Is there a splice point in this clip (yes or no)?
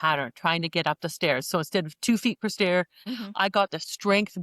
yes